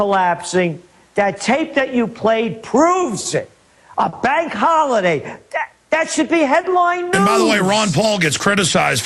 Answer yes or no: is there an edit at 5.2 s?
yes